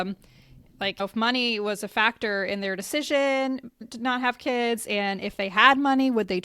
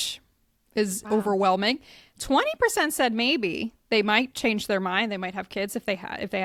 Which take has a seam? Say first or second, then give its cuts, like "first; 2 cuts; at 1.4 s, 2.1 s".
first; 2 cuts; at 1.0 s, 3.8 s